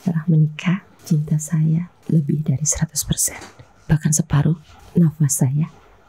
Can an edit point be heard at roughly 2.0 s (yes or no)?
yes